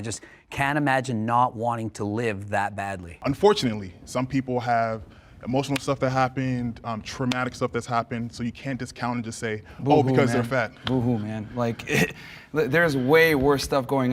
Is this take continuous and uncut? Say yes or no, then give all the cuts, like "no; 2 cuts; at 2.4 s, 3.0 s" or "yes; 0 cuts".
no; 1 cut; at 3.1 s